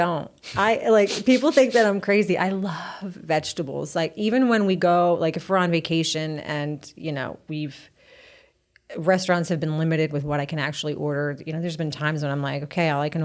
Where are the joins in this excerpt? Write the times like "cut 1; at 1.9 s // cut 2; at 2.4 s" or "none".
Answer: none

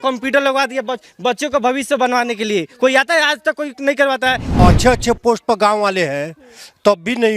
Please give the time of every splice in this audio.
cut 1; at 4.6 s

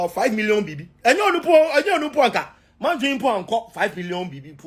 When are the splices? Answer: none

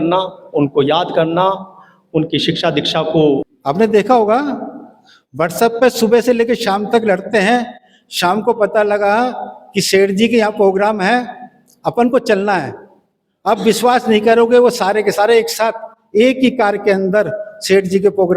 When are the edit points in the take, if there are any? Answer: cut 1; at 3.5 s

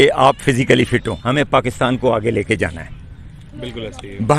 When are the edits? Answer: cut 1; at 1.1 s

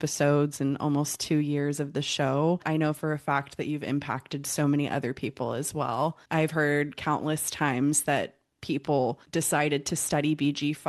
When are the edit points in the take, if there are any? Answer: cut 1; at 2.6 s // cut 2; at 6.2 s // cut 3; at 9.2 s

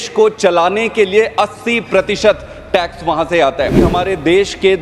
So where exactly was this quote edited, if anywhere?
cut 1; at 3.9 s

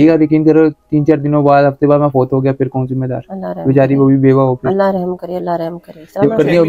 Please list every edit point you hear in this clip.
none

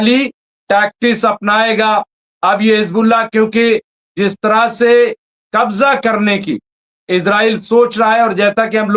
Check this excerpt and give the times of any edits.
none

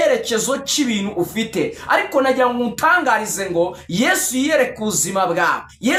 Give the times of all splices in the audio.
none

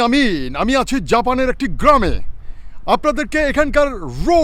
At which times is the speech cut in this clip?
none

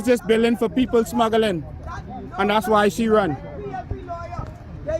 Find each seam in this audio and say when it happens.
cut 1; at 2.5 s

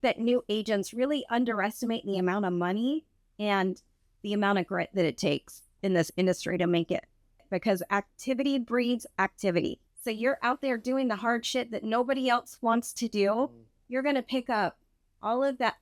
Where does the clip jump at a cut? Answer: cut 1; at 7.5 s // cut 2; at 9.9 s

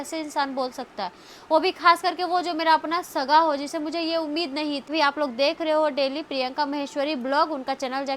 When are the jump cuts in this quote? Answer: cut 1; at 4.9 s

